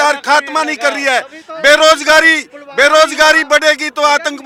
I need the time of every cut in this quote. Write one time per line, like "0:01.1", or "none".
none